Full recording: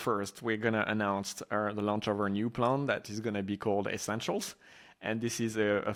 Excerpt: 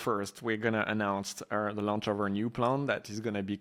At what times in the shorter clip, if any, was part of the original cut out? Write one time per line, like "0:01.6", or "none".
none